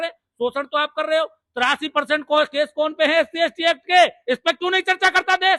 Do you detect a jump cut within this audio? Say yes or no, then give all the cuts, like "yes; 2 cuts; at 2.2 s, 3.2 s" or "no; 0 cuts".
no; 0 cuts